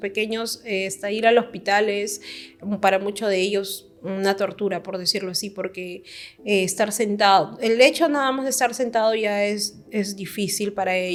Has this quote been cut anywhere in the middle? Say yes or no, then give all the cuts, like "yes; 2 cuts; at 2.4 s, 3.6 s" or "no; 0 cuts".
no; 0 cuts